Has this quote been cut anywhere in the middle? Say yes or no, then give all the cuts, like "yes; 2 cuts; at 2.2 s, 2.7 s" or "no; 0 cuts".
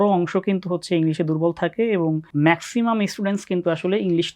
yes; 1 cut; at 2.2 s